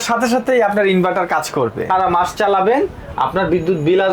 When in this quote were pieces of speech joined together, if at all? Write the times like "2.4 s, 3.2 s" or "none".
1.9 s